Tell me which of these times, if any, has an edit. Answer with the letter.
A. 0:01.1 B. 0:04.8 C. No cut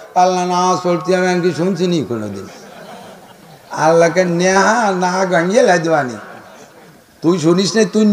C